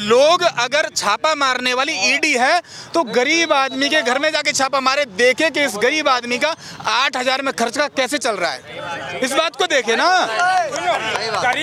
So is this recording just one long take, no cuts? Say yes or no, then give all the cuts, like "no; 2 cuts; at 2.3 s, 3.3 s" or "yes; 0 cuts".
yes; 0 cuts